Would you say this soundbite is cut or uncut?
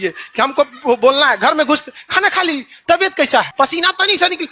cut